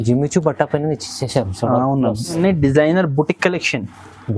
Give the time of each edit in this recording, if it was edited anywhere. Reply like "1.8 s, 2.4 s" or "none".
2.4 s